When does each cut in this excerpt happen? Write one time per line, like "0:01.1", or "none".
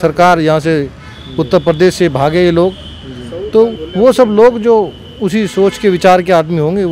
none

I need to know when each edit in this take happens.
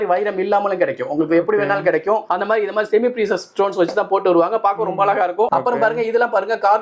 0:02.0
0:05.5

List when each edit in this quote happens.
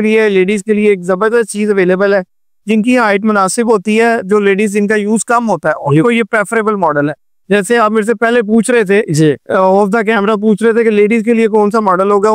none

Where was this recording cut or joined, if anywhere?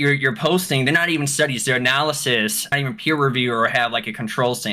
0:02.7

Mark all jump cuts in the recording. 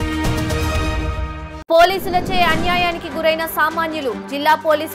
0:01.5

